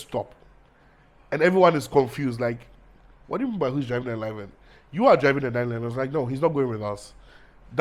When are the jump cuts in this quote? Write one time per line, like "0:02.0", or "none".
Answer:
none